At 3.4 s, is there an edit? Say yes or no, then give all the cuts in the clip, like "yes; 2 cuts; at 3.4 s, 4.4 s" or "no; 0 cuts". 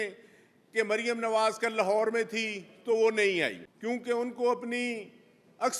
yes; 1 cut; at 3.4 s